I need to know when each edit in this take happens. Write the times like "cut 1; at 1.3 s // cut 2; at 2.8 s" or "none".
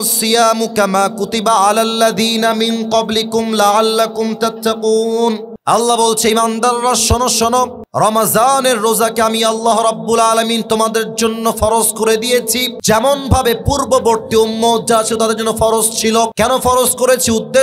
cut 1; at 5.5 s // cut 2; at 7.8 s // cut 3; at 12.7 s // cut 4; at 16.3 s

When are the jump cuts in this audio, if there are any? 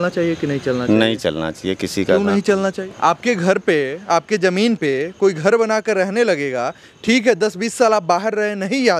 cut 1; at 2.9 s

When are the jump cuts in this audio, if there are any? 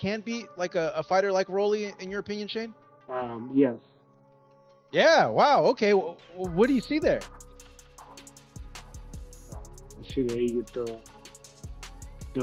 none

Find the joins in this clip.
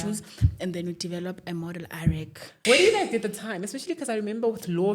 cut 1; at 2.5 s

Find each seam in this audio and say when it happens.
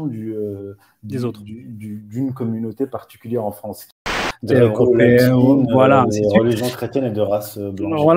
cut 1; at 4.1 s

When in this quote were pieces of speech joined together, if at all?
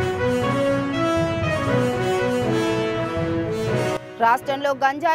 cut 1; at 4.0 s

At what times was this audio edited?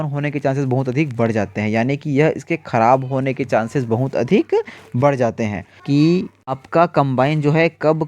cut 1; at 5.7 s

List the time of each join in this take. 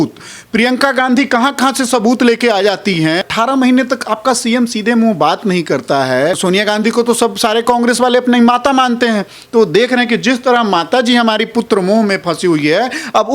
cut 1; at 3.2 s // cut 2; at 6.4 s

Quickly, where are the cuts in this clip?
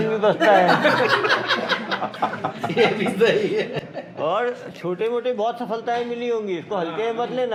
none

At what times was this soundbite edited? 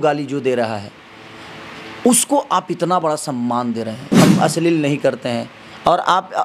cut 1; at 4.0 s

